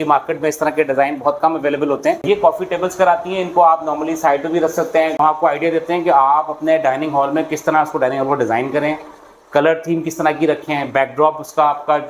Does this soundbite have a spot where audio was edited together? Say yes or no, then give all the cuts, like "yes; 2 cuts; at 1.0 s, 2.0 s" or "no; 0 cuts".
yes; 2 cuts; at 2.2 s, 5.2 s